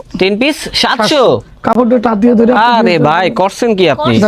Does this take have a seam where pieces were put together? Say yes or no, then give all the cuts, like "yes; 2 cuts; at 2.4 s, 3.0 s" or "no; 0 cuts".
no; 0 cuts